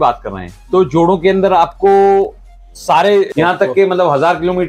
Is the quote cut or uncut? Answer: cut